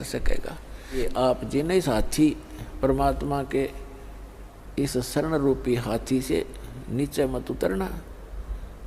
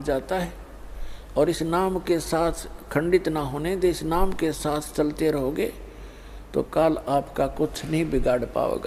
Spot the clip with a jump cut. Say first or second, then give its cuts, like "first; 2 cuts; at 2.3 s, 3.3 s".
first; 1 cut; at 1.0 s